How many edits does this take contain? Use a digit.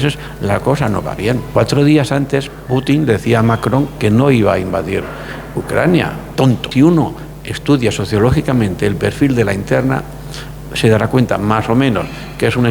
2